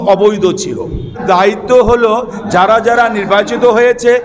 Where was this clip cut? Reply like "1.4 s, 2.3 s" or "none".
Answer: none